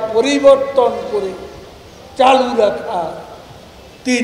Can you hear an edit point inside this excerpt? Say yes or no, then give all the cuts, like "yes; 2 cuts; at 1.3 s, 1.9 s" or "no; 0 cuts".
no; 0 cuts